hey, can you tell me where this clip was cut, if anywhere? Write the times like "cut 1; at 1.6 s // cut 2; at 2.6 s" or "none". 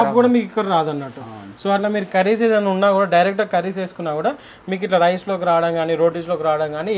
none